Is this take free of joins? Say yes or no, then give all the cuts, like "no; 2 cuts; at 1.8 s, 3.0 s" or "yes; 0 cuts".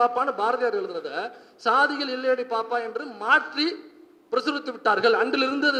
yes; 0 cuts